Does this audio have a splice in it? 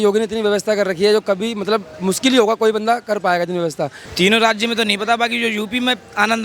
yes; 1 cut; at 4.0 s

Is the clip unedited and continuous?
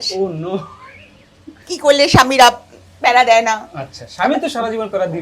no; 1 cut; at 1.6 s

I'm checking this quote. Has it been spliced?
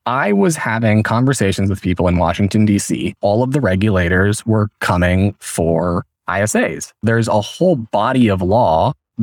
yes; 2 cuts; at 3.2 s, 6.9 s

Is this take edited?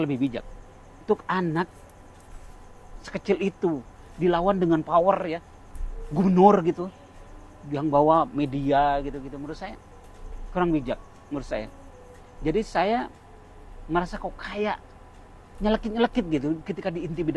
yes; 1 cut; at 1.0 s

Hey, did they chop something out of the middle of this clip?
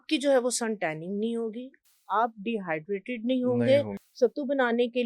yes; 1 cut; at 4.0 s

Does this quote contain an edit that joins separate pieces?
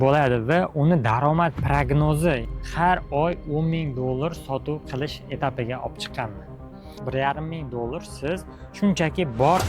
yes; 2 cuts; at 2.5 s, 7.0 s

